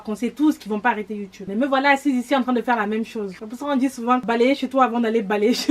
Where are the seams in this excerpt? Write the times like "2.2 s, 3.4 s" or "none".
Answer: 1.4 s, 3.4 s, 4.2 s